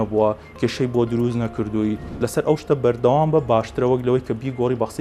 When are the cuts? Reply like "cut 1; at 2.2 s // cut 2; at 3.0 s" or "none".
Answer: cut 1; at 2.1 s